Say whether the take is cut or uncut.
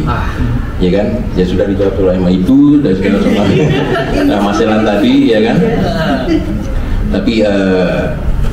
uncut